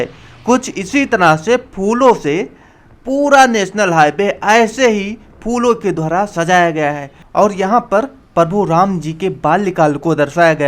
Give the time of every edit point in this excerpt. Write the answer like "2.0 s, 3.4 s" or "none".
7.1 s

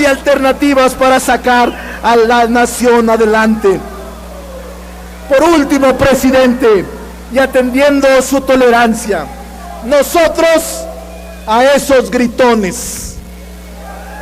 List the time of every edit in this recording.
10.8 s

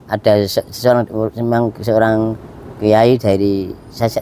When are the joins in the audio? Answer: none

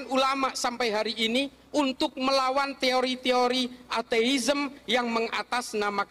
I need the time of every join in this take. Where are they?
none

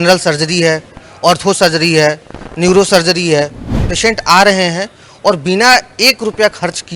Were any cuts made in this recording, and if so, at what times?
3.8 s

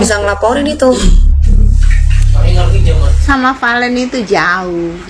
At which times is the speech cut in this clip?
3.2 s

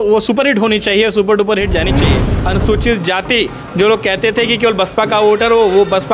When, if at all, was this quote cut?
2.3 s

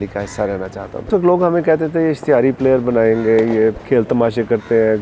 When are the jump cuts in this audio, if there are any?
1.1 s, 3.8 s

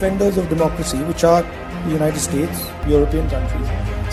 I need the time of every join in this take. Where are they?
none

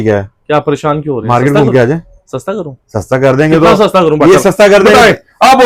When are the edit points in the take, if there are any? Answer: none

